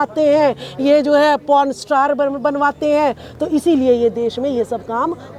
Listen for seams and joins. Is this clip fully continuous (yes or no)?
yes